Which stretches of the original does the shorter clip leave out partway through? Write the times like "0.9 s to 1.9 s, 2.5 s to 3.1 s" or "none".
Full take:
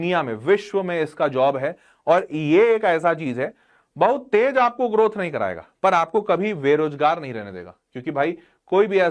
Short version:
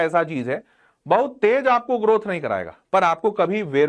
none

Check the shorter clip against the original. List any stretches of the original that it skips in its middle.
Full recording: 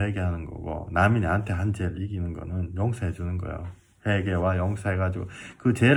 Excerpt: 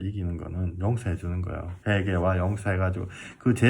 3.7 s to 3.9 s

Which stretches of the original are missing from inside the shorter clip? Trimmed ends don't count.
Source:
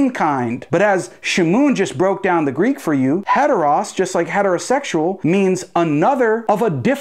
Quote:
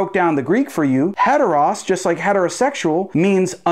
none

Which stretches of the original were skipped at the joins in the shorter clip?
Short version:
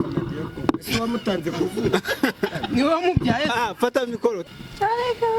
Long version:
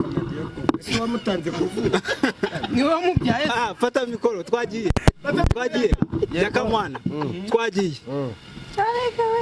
4.4 s to 8.4 s

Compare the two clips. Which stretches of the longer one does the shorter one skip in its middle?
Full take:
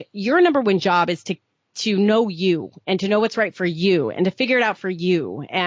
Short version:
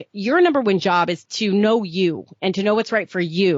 1.2 s to 1.7 s

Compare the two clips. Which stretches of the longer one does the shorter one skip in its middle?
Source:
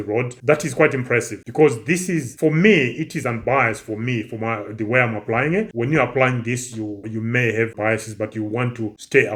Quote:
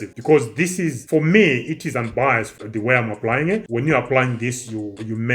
3.9 s to 4.6 s

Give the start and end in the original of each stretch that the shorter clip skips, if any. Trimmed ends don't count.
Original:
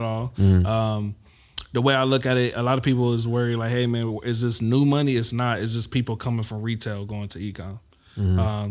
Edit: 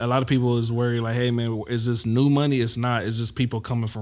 none

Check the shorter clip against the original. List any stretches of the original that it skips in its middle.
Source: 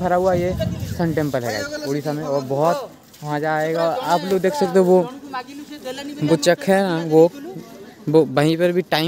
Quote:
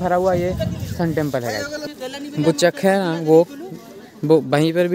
1.8 s to 5.6 s

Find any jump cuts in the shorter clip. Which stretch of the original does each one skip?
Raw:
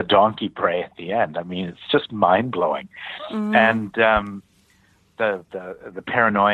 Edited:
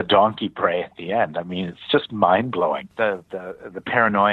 2.9 s to 5.1 s

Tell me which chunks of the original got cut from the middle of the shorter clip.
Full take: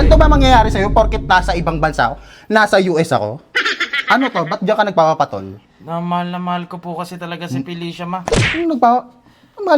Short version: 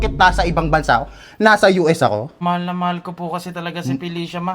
3.5 s to 6.0 s

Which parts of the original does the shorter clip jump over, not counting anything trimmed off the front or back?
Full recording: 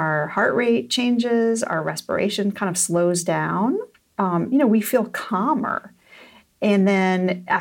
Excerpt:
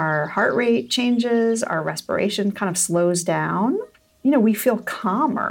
4.2 s to 4.4 s

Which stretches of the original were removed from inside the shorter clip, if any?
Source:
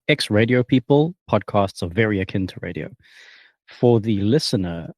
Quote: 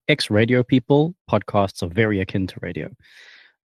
none

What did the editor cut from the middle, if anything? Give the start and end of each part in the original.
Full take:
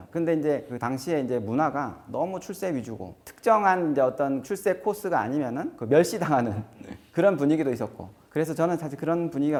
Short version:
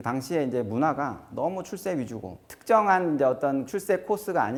none

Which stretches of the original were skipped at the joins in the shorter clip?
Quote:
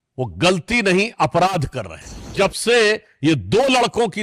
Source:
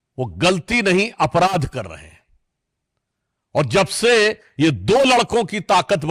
2.3 s to 3.7 s

